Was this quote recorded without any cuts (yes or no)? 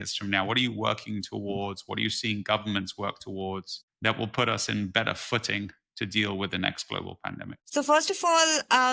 yes